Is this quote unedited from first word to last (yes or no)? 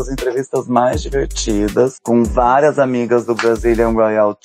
yes